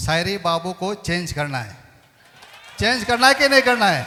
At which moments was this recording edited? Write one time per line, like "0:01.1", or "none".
none